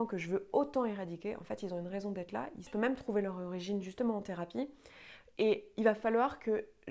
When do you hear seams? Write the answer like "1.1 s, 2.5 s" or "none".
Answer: 2.7 s